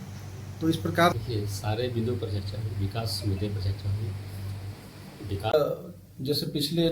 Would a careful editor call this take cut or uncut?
cut